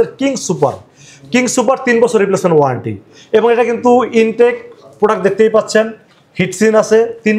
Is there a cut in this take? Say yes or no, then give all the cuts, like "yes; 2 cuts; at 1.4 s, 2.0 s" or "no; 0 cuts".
no; 0 cuts